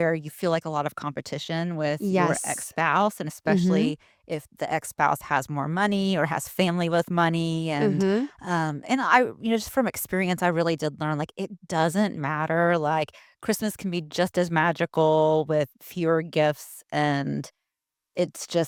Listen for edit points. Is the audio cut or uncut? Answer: uncut